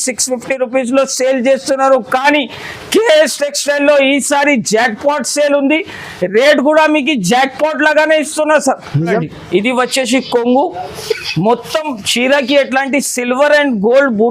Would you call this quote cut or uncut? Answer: cut